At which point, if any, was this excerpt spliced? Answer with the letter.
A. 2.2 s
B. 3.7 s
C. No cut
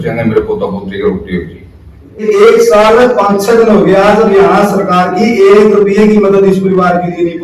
A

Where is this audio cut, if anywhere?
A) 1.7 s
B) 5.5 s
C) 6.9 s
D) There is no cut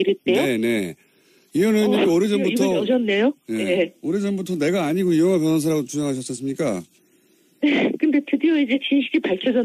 B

